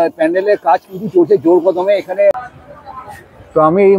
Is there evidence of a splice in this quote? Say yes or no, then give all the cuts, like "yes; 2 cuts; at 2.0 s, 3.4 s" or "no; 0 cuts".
yes; 1 cut; at 2.4 s